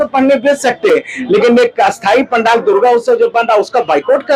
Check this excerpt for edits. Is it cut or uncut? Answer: uncut